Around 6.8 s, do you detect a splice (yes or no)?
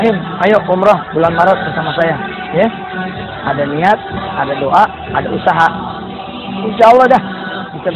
no